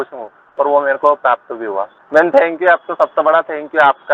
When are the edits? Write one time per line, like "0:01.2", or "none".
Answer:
0:02.0